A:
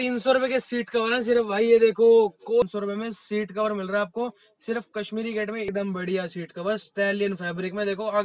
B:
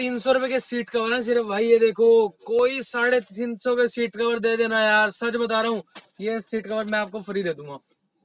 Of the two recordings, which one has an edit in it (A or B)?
A